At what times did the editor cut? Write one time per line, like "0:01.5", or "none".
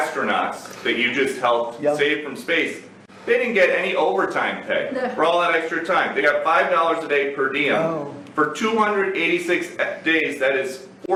none